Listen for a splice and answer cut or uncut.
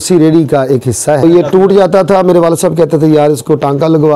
cut